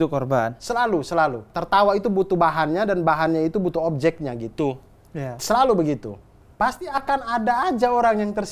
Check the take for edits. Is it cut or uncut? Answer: cut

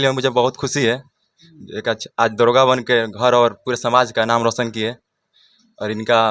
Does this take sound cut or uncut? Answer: uncut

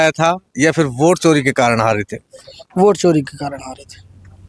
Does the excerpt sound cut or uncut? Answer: uncut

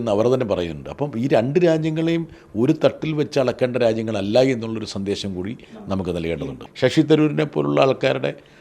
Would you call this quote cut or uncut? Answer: cut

